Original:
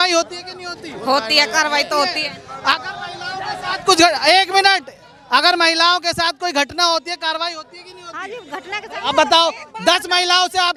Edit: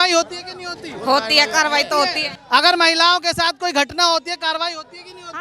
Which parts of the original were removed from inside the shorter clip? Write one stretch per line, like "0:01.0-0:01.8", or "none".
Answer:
0:02.3-0:05.1